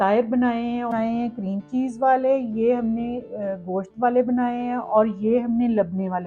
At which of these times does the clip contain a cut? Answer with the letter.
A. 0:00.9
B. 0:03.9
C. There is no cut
A